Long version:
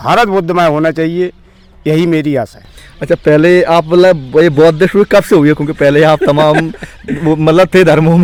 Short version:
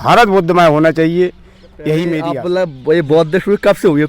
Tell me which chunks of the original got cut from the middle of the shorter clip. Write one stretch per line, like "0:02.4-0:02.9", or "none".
0:02.3-0:03.8